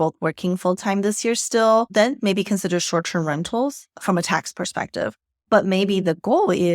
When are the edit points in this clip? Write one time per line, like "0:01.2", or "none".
0:01.9